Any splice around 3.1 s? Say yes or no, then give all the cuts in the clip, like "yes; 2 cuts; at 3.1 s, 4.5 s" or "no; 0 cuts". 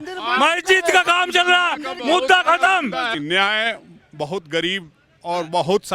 yes; 1 cut; at 3.1 s